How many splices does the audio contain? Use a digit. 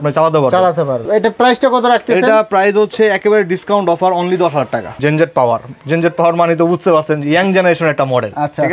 2